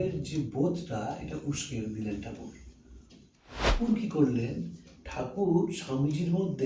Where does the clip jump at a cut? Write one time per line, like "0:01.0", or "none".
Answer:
0:03.7